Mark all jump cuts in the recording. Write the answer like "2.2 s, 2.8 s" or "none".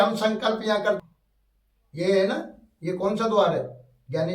1.0 s